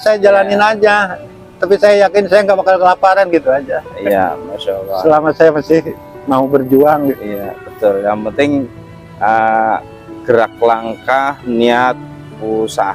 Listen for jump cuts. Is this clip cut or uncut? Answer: uncut